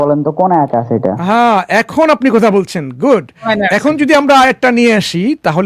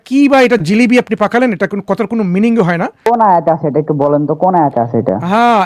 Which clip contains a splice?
second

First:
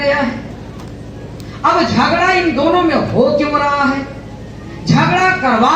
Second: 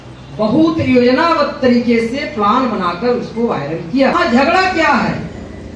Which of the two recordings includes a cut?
second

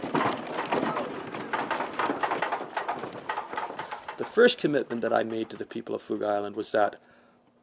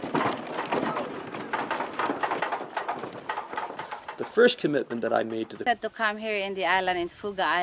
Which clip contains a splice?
first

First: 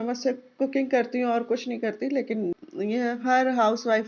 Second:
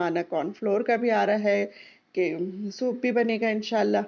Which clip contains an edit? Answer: first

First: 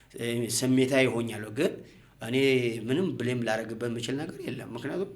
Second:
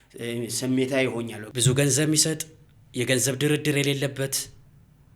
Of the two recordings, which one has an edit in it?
second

